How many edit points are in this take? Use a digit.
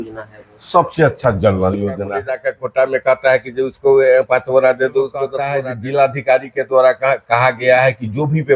2